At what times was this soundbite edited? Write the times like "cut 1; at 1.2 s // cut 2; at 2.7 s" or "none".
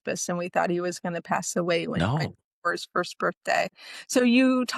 none

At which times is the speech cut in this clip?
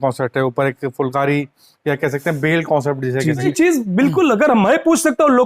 cut 1; at 3.5 s

